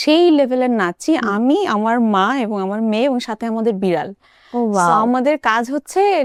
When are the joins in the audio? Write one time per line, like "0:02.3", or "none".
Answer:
none

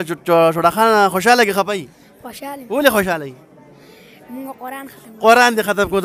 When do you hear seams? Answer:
none

